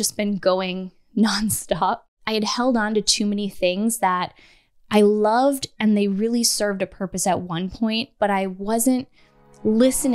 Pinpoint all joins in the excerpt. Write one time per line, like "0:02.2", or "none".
0:02.1